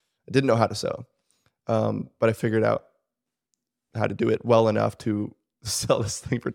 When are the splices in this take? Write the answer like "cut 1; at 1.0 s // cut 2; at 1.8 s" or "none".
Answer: none

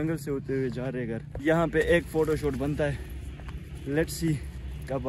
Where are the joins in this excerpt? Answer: cut 1; at 1.3 s

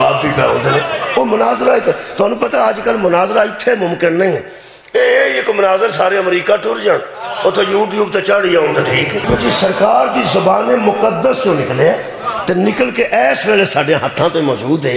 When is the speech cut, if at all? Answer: cut 1; at 9.3 s

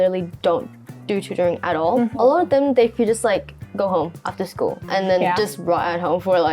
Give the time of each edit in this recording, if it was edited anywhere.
cut 1; at 2.1 s

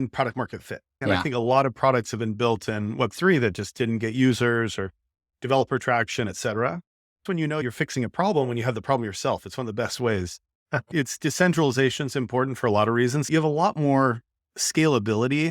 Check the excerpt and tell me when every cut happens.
cut 1; at 1.0 s // cut 2; at 7.5 s // cut 3; at 10.8 s // cut 4; at 13.3 s

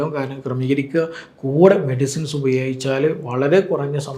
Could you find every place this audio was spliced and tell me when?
none

